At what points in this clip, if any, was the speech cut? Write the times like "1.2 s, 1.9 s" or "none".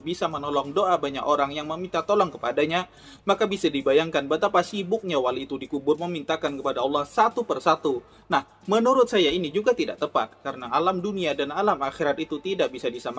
none